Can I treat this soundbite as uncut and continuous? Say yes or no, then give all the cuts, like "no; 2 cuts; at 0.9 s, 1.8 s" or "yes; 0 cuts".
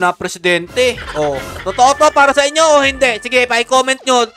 no; 1 cut; at 1.6 s